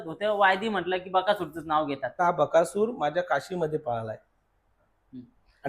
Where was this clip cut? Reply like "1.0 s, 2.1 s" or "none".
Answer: 2.1 s